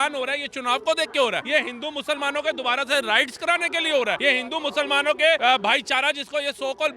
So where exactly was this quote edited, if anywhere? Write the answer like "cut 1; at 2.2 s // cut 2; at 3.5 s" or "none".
cut 1; at 1.4 s // cut 2; at 4.2 s // cut 3; at 5.4 s